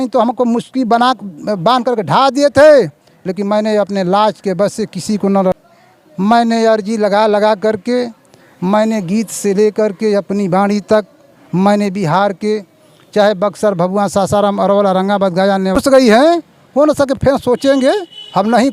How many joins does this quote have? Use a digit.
2